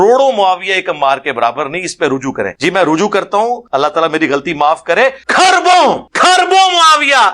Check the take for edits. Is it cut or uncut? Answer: cut